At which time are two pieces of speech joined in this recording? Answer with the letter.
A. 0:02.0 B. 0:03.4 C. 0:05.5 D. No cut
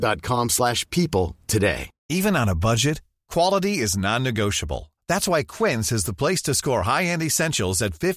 A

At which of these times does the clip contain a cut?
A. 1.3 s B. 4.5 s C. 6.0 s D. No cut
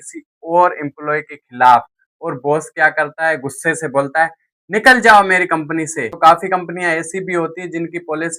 C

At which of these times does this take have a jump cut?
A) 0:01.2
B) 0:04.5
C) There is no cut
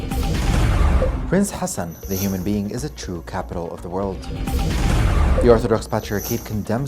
A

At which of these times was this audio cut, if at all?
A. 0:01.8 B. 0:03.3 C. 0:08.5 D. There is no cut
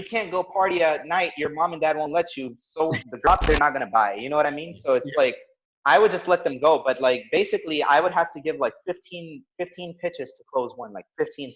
B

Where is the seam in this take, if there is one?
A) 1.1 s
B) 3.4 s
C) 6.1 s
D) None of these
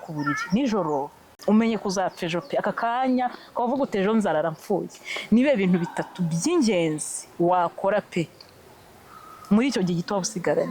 A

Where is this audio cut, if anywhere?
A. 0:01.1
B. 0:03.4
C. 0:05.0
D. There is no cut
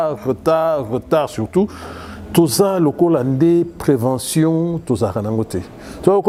D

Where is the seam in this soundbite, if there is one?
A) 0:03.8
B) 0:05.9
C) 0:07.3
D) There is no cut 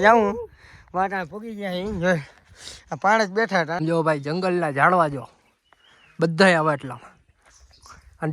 A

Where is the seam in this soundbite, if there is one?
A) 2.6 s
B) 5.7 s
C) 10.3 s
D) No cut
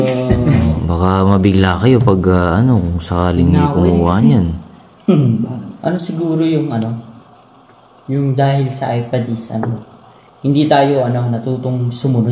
B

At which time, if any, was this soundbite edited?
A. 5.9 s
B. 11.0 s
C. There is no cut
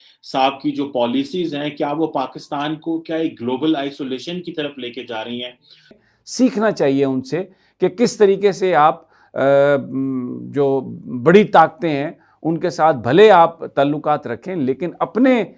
A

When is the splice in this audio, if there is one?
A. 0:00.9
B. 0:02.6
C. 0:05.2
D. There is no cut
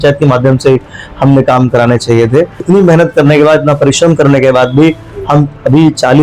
B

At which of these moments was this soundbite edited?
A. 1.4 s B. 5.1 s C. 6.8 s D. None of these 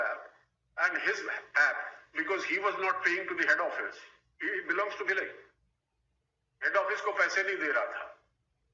D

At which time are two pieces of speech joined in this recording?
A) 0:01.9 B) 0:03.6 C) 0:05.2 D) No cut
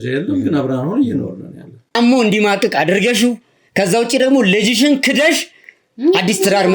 A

